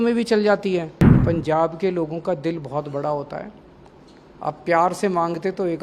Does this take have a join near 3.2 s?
no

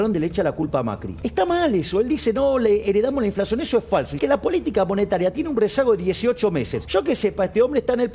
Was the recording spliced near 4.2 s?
yes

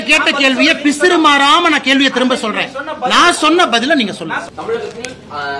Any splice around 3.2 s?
no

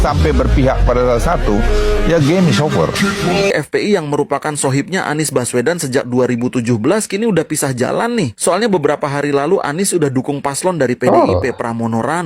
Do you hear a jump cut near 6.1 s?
no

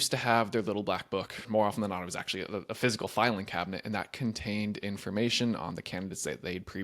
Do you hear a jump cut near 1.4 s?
yes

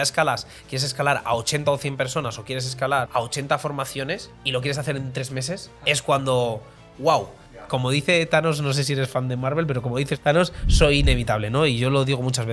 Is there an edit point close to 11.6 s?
no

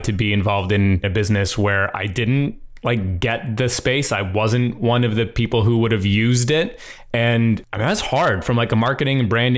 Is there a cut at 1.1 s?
yes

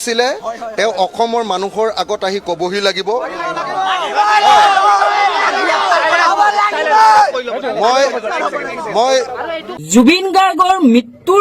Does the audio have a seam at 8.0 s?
no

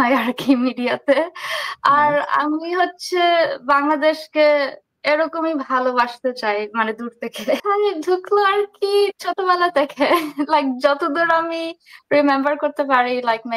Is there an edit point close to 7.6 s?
yes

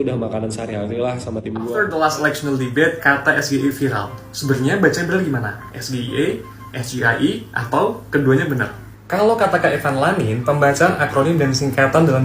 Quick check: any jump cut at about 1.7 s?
yes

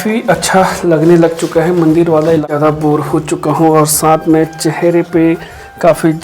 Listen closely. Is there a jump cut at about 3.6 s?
no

